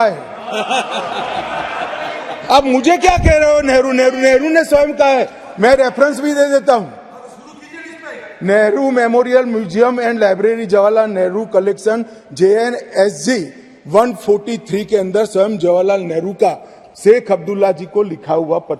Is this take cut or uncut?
uncut